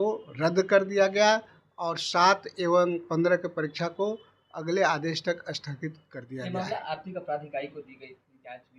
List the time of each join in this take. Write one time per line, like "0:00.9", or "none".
none